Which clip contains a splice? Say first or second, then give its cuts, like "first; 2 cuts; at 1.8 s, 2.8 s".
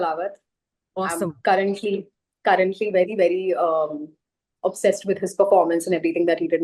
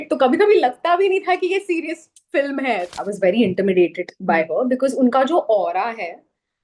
second; 1 cut; at 2.9 s